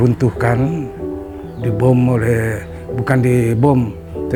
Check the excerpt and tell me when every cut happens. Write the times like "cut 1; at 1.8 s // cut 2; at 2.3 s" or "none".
none